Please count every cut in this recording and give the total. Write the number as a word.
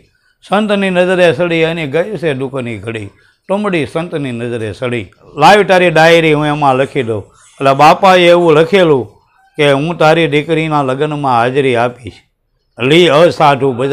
one